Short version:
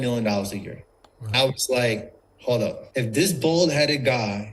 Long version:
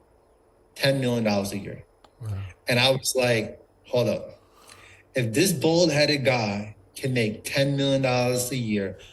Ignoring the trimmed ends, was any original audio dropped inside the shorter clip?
yes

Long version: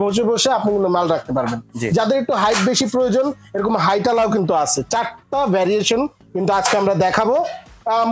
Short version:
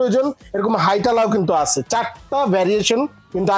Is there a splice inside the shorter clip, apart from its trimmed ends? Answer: no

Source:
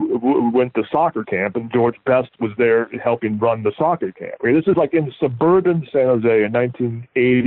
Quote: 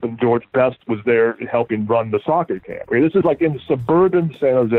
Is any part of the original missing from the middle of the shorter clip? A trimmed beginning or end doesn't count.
no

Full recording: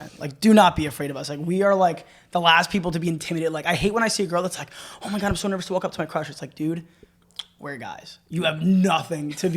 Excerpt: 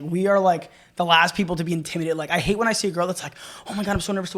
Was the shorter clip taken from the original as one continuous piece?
yes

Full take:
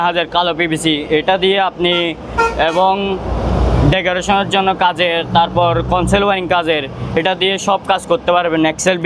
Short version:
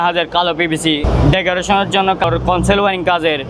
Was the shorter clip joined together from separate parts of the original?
yes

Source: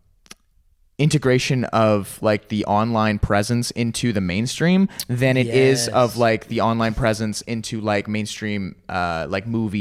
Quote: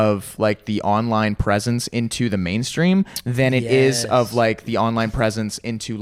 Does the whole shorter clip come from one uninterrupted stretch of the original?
yes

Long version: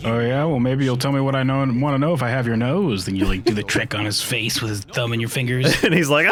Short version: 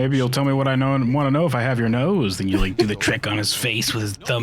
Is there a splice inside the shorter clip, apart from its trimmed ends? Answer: no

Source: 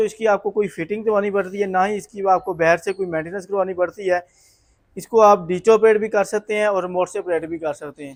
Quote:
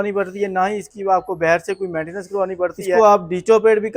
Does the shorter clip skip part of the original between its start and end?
yes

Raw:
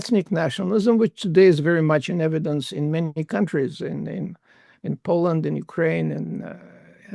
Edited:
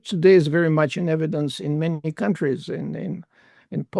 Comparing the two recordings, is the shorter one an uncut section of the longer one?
yes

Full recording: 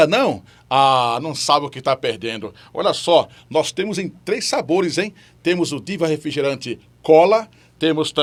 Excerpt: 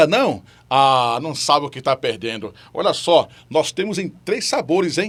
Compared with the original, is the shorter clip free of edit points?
yes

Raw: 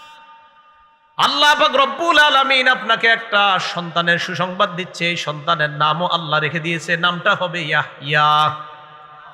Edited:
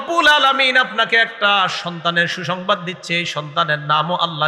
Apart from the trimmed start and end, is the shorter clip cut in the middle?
no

